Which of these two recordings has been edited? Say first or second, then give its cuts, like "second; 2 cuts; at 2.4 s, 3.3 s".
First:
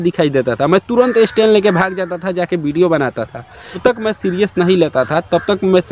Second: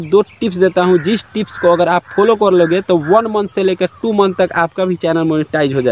first; 1 cut; at 3.8 s